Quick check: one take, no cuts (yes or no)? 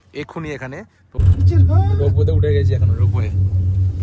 no